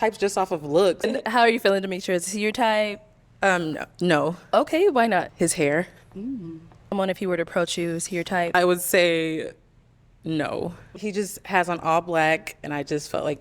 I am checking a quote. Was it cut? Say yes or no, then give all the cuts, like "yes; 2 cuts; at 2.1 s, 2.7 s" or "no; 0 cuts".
yes; 5 cuts; at 1.1 s, 5.3 s, 6.9 s, 8.5 s, 10.9 s